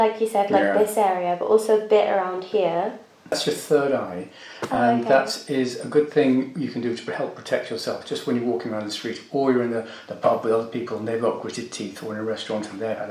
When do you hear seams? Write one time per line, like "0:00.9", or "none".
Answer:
0:03.3